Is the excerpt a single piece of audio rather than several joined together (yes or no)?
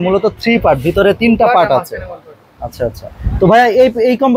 yes